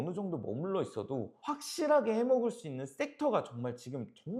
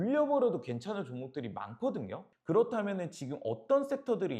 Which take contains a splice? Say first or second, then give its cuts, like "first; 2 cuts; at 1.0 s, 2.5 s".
second; 1 cut; at 2.3 s